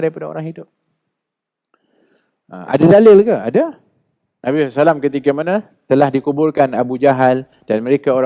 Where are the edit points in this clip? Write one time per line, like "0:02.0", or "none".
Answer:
none